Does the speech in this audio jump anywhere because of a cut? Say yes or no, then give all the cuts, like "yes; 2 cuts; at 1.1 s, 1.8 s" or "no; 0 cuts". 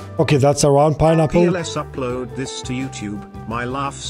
yes; 1 cut; at 1.5 s